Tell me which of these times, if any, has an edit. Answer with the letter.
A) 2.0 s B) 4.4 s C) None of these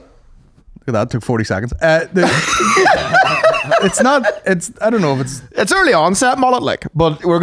C